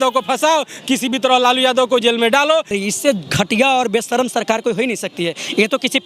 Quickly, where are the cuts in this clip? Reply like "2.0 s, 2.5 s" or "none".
2.7 s